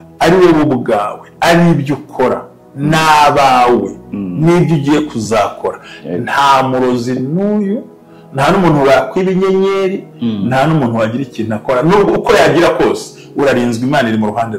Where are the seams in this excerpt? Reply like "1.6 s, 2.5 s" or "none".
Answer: none